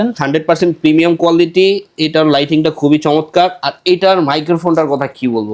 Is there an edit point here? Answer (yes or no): no